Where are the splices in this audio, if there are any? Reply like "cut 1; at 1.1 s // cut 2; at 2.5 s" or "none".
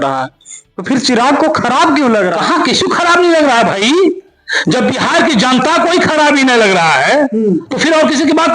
none